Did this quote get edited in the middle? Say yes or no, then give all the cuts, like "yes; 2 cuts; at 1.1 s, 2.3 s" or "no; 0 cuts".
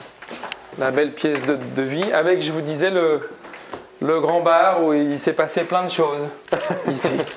no; 0 cuts